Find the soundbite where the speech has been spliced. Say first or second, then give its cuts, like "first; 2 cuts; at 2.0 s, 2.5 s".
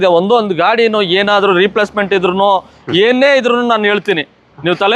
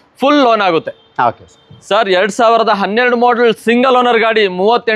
second; 1 cut; at 1.7 s